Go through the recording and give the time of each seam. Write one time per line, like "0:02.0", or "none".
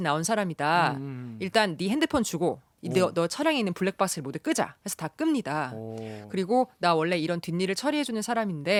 none